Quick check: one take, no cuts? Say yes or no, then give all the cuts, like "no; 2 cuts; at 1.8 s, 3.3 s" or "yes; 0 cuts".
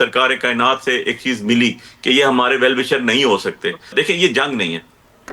no; 1 cut; at 3.9 s